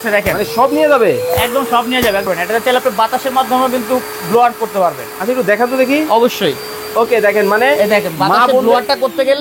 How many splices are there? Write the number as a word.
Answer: one